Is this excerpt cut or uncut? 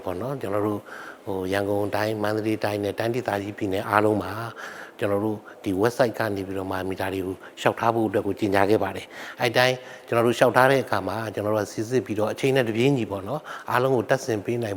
uncut